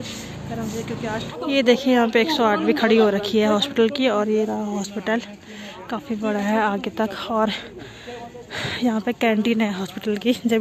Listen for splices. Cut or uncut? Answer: cut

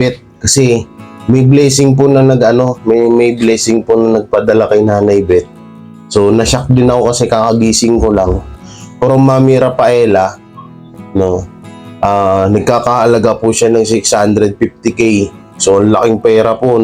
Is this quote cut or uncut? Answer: cut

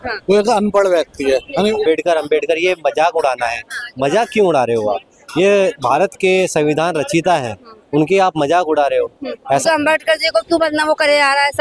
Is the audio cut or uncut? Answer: cut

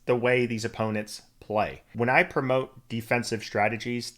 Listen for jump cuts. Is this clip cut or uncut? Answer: cut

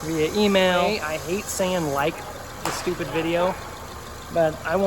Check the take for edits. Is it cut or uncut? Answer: cut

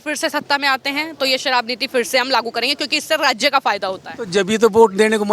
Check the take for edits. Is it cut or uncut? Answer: uncut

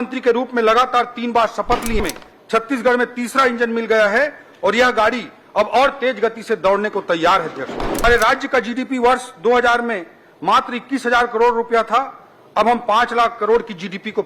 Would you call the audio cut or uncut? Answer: cut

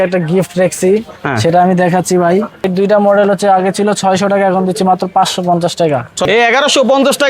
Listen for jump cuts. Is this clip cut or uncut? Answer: cut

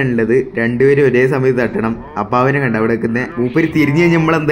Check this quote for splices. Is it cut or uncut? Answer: cut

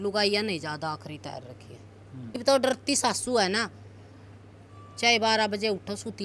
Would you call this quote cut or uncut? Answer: cut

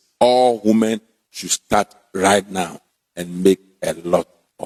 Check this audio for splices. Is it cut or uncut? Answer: uncut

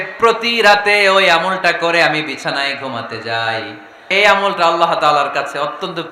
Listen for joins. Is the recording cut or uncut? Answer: cut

